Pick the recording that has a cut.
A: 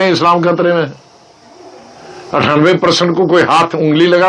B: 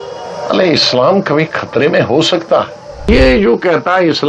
B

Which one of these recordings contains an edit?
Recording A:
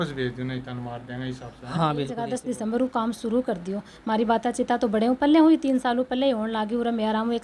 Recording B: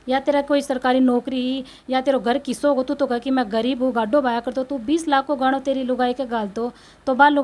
A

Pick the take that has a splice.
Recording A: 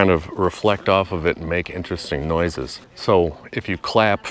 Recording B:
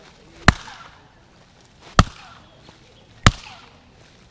A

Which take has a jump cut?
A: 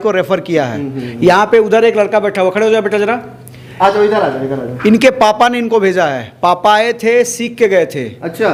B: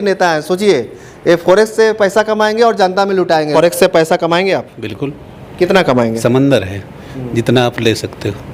B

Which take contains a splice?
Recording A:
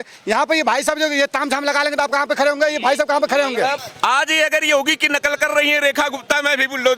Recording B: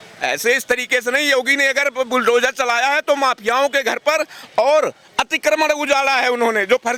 A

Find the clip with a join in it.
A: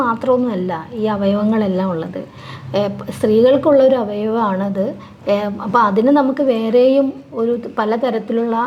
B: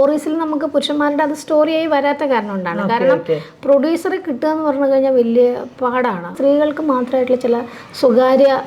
B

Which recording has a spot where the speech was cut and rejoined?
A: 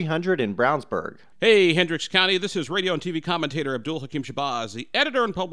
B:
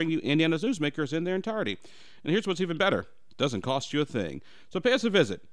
A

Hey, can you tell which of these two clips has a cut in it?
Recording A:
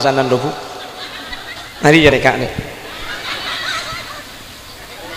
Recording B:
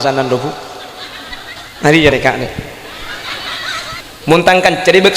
B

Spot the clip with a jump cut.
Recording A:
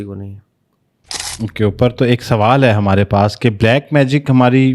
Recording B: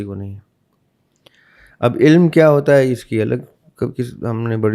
A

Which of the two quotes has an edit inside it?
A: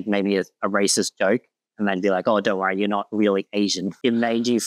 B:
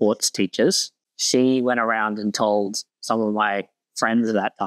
B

